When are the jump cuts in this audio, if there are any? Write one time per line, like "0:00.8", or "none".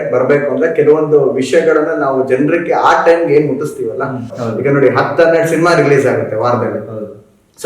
0:04.3